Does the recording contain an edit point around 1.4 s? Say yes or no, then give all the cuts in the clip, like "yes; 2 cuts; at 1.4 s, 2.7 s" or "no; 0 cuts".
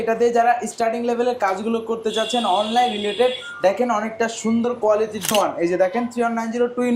no; 1 cut; at 5.3 s